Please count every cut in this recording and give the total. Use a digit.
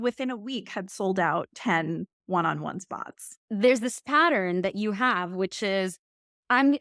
1